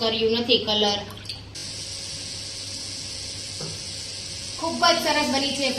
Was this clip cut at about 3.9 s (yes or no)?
no